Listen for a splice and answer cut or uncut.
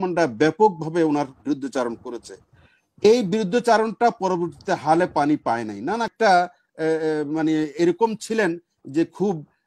cut